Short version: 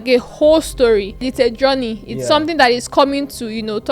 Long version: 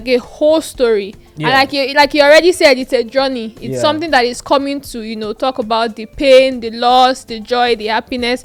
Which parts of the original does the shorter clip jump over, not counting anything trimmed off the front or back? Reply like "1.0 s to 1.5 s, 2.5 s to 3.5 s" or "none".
1.3 s to 2.8 s